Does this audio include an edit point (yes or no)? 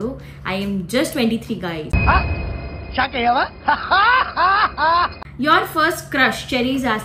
yes